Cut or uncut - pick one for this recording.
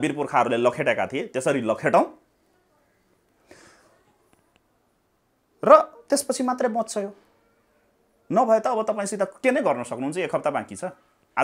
uncut